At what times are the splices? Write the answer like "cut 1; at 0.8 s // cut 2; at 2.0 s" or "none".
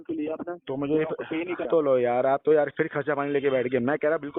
cut 1; at 1.6 s